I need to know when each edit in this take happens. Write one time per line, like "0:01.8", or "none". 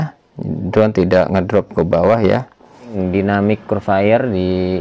0:03.0